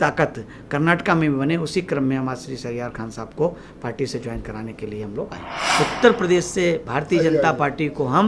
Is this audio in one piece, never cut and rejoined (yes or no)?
no